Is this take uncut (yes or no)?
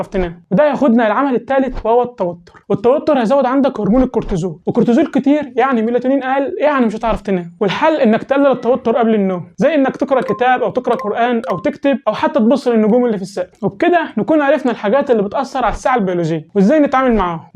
no